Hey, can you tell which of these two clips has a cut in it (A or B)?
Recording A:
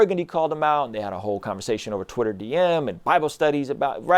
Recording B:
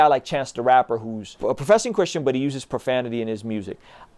B